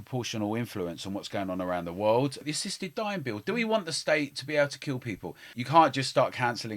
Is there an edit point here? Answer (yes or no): yes